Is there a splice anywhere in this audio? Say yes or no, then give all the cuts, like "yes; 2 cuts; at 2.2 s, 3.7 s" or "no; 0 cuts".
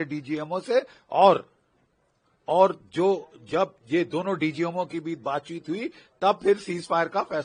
no; 0 cuts